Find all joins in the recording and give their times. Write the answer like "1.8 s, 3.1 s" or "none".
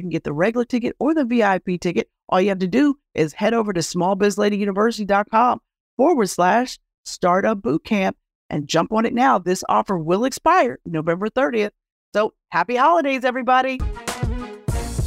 13.9 s